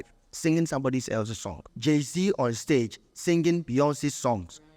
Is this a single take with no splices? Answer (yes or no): no